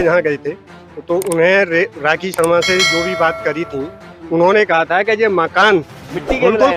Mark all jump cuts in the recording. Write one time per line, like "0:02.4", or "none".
none

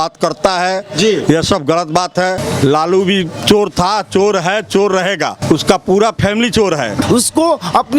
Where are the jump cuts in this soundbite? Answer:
0:02.4
0:05.4
0:07.0

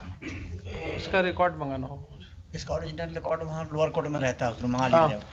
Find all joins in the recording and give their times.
none

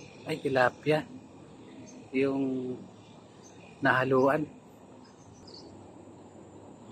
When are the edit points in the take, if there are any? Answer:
0:05.3

